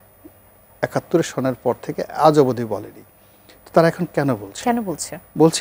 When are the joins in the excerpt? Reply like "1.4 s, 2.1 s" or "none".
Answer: none